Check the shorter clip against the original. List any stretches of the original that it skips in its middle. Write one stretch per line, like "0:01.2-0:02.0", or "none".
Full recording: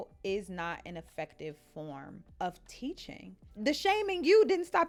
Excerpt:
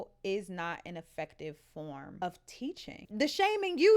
0:02.2-0:02.4
0:03.1-0:03.4